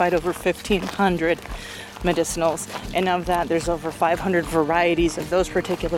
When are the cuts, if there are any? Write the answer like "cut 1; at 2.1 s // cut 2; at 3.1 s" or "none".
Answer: none